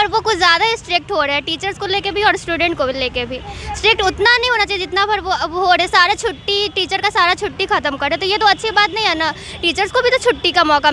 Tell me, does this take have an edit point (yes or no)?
no